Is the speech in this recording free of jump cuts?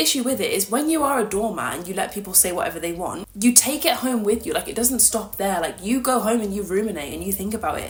yes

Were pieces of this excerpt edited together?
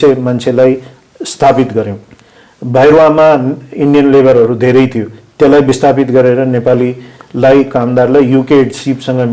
no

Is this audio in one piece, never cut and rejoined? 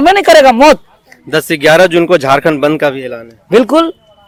yes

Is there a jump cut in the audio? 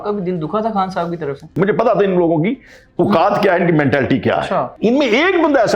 yes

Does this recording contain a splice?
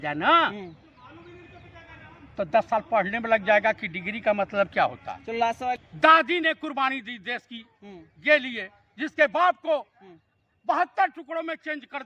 yes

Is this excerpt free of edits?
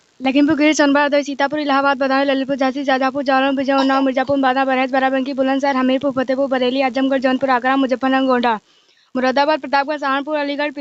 yes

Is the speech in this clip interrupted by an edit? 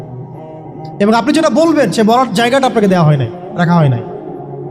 yes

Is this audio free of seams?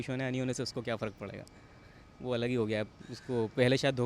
yes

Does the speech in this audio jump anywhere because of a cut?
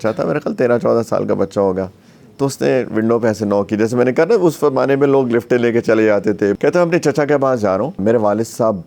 yes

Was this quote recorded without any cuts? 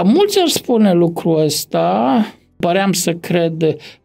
no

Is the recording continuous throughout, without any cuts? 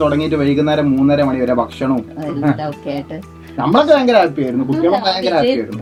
yes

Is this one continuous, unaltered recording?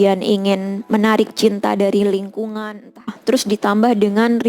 no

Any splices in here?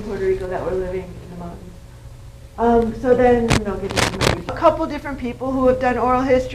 no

